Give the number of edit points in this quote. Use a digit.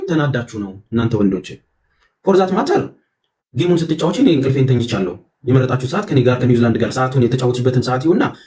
0